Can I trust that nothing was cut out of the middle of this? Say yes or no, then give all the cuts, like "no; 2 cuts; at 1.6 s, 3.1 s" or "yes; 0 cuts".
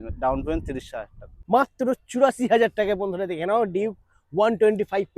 no; 1 cut; at 1.3 s